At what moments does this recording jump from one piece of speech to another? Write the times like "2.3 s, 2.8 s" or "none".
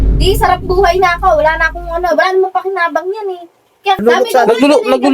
4.0 s